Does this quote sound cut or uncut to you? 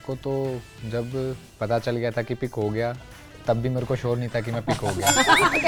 uncut